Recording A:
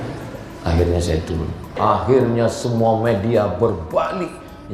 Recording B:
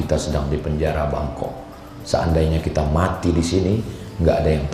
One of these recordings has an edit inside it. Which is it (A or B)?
A